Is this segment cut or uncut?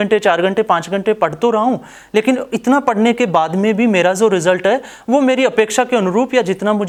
uncut